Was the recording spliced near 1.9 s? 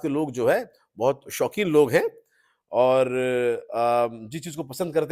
no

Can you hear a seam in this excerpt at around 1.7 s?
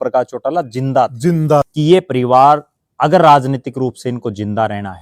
yes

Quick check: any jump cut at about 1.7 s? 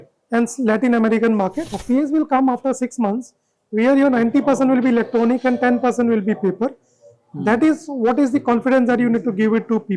yes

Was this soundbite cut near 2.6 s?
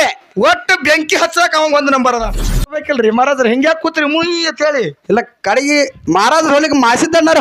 yes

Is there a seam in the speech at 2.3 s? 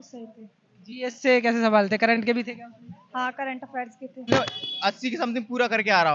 no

